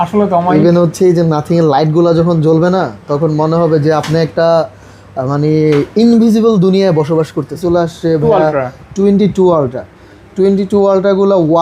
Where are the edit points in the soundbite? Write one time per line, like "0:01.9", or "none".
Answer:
0:07.6